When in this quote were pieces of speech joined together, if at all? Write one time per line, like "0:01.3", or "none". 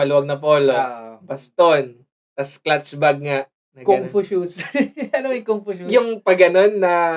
none